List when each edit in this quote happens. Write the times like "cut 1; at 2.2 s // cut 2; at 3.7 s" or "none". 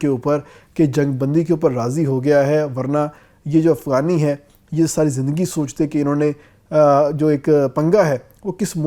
none